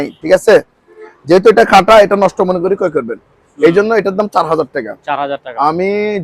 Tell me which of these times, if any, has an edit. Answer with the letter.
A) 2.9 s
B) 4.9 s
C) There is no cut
C